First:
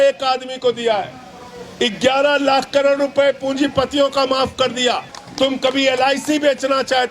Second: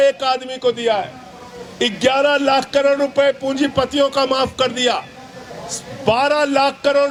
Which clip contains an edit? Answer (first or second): first